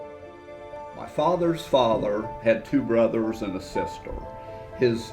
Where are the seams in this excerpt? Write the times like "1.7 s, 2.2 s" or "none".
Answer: 0.9 s